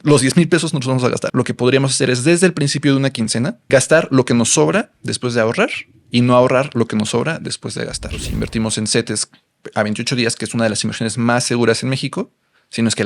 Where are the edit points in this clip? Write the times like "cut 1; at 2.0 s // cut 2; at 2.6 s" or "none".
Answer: cut 1; at 1.3 s // cut 2; at 3.6 s // cut 3; at 8.2 s